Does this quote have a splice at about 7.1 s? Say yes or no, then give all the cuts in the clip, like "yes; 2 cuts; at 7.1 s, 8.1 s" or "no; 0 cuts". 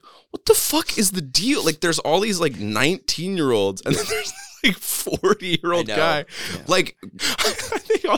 yes; 1 cut; at 7.1 s